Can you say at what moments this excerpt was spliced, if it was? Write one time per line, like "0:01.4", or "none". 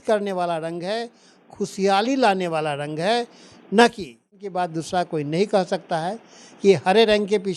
0:04.4